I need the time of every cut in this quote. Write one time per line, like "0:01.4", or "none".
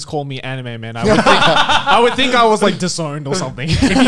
none